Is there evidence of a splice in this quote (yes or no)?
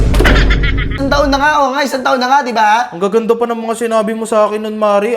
yes